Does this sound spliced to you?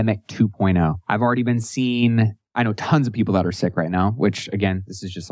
yes; 2 cuts; at 1.0 s, 2.4 s

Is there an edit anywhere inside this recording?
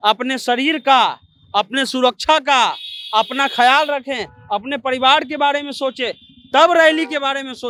no; 0 cuts

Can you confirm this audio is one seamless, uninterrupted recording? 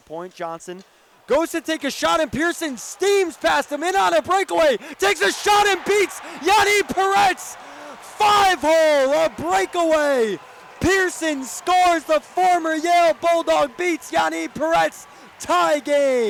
yes; 0 cuts

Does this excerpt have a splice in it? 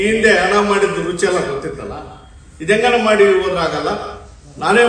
no; 0 cuts

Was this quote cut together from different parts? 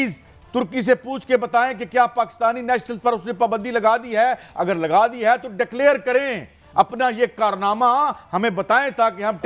no; 0 cuts

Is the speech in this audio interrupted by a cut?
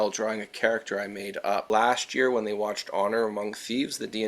yes; 1 cut; at 1.6 s

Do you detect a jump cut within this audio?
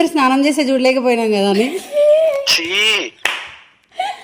no; 0 cuts

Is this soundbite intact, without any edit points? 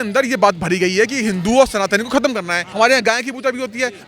no; 1 cut; at 2.6 s

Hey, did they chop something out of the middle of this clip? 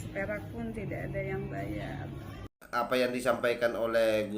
yes; 1 cut; at 2.5 s

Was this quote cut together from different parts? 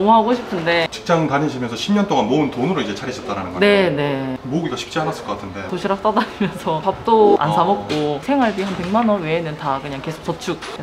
yes; 1 cut; at 0.9 s

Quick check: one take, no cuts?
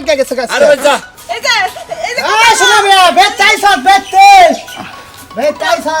no; 1 cut; at 1.2 s

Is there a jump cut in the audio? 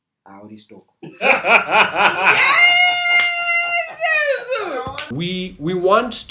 yes; 1 cut; at 5.0 s

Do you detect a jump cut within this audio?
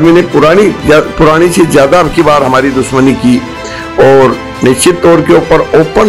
no; 0 cuts

